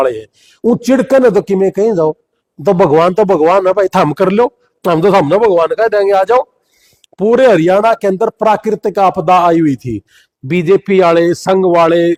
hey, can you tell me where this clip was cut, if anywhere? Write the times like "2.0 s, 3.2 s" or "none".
none